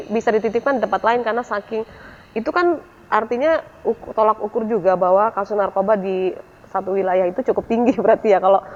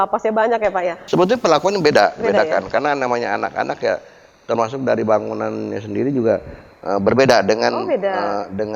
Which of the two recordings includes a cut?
second; 1 cut; at 1.0 s

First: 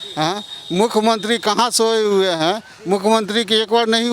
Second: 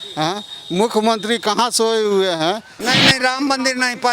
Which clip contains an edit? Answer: second; 1 cut; at 2.7 s

